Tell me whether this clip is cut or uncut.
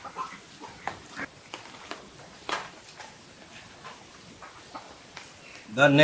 uncut